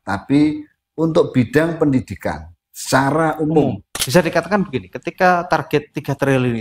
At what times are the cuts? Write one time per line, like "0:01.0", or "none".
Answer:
0:03.9